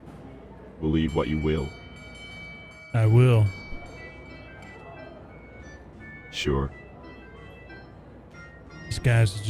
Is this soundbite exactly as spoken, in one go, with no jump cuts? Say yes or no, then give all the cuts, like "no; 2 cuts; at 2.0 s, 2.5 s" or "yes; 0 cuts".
yes; 0 cuts